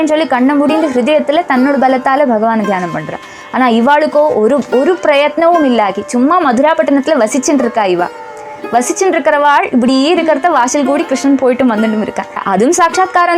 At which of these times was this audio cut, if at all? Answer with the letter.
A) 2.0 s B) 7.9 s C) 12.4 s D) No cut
C